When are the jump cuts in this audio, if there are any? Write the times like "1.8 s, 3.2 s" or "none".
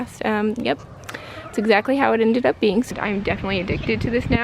2.9 s